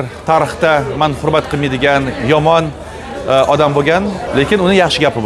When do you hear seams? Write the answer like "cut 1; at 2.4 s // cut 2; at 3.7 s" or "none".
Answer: cut 1; at 4.2 s